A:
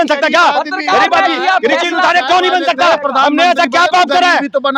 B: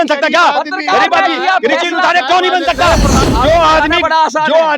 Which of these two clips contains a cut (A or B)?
B